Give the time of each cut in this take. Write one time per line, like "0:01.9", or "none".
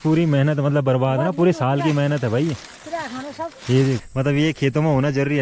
0:04.1